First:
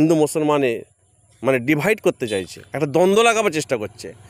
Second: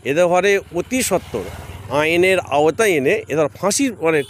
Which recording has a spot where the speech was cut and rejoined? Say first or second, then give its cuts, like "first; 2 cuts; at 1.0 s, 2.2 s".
first; 1 cut; at 2.6 s